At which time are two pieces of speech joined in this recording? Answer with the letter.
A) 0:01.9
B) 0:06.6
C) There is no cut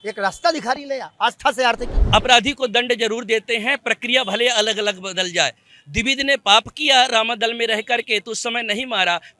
A